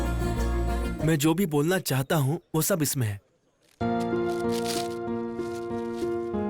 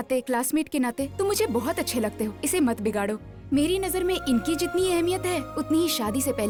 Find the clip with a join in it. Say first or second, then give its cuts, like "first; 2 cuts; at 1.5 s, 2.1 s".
first; 1 cut; at 0.9 s